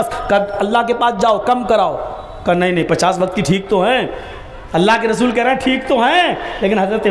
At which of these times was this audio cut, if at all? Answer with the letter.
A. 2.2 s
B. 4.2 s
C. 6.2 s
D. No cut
D